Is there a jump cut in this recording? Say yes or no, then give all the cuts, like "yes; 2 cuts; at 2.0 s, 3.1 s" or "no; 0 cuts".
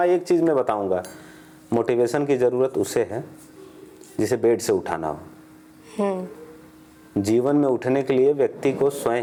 no; 0 cuts